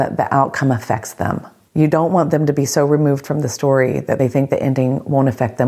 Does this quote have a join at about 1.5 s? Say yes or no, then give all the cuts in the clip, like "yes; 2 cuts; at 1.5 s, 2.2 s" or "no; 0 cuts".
yes; 2 cuts; at 1.5 s, 4.2 s